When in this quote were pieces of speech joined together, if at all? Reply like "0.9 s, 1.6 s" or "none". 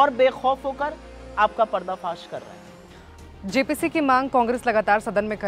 none